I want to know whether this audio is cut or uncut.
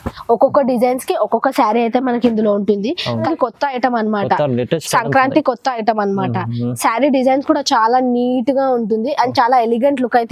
cut